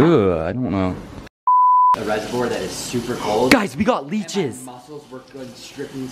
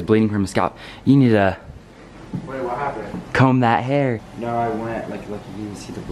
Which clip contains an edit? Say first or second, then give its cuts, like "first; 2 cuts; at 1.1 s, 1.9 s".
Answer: first; 1 cut; at 2.0 s